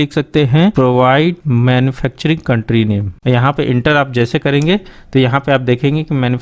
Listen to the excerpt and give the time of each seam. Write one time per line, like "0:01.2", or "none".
0:01.4
0:03.1